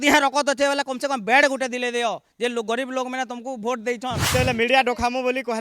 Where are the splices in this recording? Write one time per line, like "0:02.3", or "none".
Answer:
0:04.2